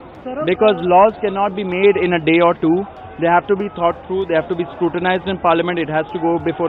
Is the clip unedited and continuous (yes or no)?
yes